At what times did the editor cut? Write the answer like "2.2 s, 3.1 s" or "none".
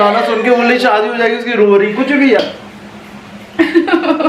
2.4 s

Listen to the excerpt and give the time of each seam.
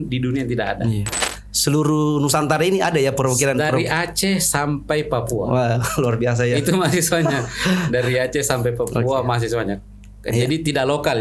1.3 s

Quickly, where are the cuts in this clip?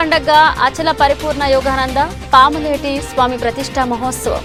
none

